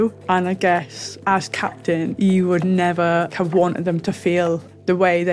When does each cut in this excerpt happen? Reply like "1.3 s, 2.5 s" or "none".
2.1 s